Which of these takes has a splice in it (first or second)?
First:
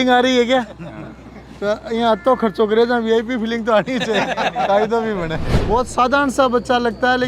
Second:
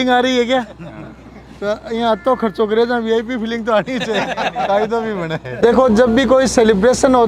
first